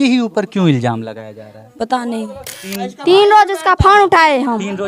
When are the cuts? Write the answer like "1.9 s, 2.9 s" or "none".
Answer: 2.5 s